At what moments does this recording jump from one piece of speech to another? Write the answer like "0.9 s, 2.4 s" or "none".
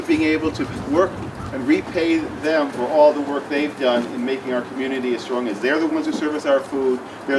none